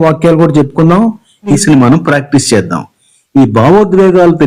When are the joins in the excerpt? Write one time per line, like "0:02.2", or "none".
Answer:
0:01.6